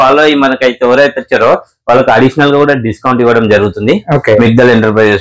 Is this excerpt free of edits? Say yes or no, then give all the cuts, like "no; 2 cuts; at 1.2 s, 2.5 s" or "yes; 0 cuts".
yes; 0 cuts